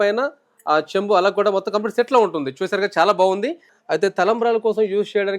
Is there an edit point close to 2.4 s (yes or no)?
no